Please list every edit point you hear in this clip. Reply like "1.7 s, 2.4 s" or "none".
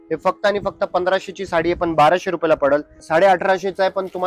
3.0 s